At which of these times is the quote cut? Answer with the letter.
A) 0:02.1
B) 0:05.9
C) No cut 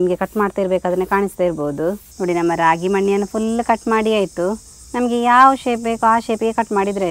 A